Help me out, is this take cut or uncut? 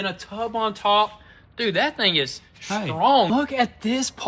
cut